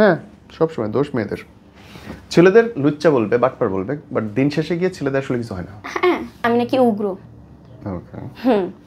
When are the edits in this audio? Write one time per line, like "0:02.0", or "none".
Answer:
0:06.5